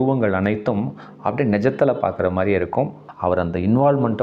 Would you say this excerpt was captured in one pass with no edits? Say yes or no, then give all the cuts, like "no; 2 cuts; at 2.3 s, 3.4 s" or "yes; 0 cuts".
no; 1 cut; at 3.0 s